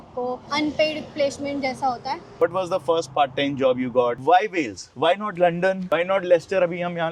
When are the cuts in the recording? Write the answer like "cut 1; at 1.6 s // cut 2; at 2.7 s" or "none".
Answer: cut 1; at 2.3 s // cut 2; at 4.2 s